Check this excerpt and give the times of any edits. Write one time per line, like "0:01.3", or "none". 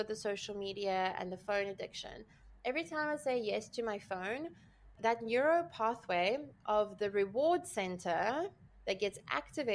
0:05.0